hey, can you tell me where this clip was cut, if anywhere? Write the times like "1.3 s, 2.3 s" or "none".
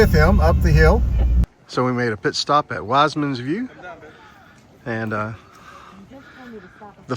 1.5 s